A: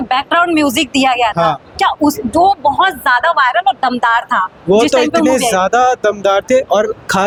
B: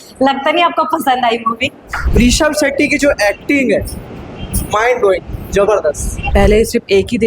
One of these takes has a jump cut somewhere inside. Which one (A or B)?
B